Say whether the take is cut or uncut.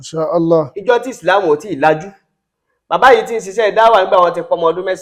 uncut